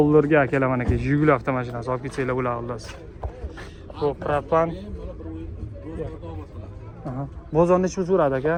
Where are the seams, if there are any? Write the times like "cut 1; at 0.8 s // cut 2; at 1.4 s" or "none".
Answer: none

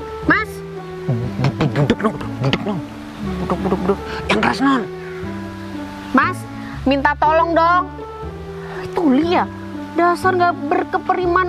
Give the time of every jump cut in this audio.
cut 1; at 4.1 s

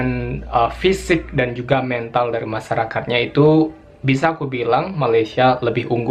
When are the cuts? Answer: none

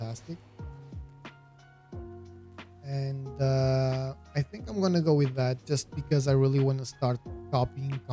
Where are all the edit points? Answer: cut 1; at 1.0 s // cut 2; at 2.8 s

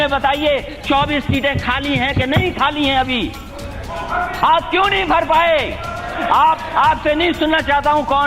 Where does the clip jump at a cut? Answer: none

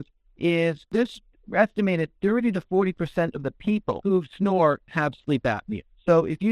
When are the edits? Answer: cut 1; at 0.9 s // cut 2; at 4.0 s

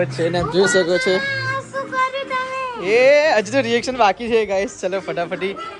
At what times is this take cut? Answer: none

